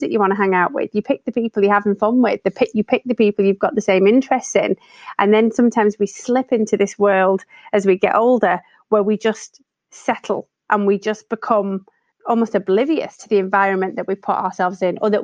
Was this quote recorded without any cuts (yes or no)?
yes